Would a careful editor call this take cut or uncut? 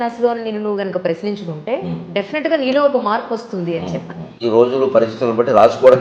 cut